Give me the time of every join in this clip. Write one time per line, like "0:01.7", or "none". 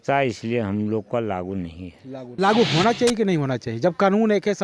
0:02.3